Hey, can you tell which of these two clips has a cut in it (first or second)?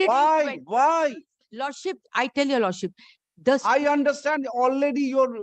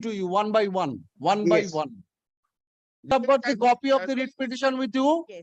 second